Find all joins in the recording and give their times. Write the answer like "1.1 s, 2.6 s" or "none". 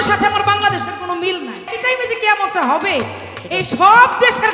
1.7 s